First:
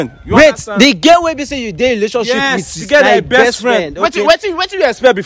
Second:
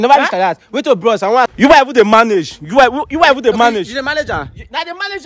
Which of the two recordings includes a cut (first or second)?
second